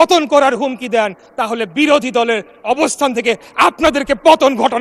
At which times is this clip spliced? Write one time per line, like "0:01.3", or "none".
none